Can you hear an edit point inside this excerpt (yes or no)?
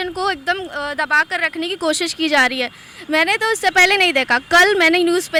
no